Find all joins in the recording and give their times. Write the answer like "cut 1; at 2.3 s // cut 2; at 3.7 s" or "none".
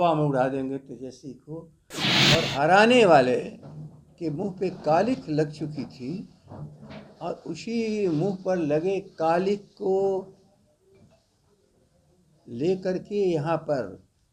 cut 1; at 2.1 s